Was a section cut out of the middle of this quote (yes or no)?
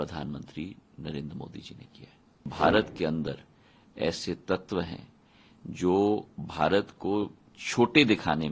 yes